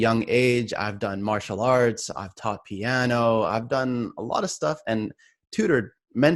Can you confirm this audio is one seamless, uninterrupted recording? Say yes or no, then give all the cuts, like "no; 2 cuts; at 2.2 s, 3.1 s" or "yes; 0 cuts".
yes; 0 cuts